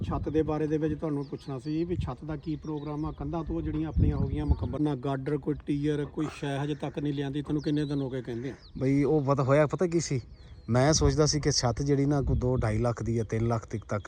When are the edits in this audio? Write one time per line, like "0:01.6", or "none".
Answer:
0:04.8